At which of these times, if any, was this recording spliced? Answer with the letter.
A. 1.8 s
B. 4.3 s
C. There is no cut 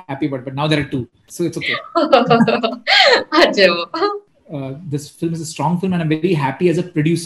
B